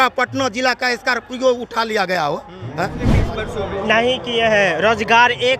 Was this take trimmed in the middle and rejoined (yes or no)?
yes